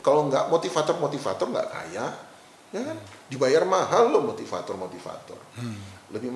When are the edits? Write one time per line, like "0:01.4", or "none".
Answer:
none